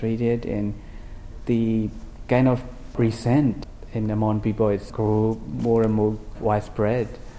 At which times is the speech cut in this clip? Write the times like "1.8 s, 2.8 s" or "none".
none